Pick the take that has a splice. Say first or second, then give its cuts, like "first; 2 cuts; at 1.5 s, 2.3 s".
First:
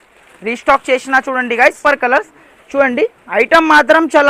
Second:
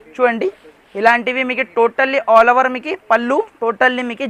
first; 1 cut; at 1.8 s